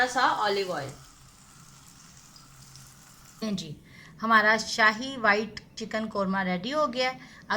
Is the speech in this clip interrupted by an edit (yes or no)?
yes